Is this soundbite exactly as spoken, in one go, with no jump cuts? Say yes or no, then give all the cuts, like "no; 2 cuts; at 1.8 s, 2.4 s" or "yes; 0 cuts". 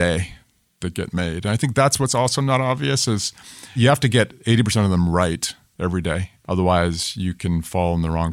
yes; 0 cuts